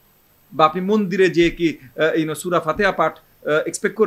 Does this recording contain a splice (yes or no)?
no